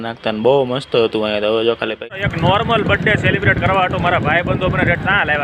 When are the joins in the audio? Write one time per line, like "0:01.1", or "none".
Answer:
0:02.0